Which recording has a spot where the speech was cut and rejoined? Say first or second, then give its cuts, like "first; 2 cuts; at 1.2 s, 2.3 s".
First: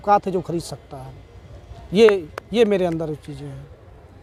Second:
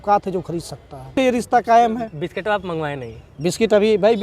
second; 1 cut; at 1.1 s